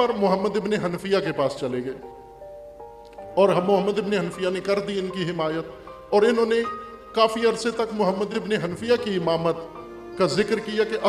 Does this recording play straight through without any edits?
no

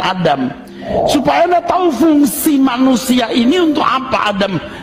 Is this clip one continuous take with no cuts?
yes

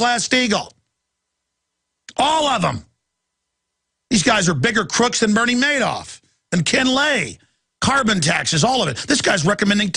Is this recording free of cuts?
no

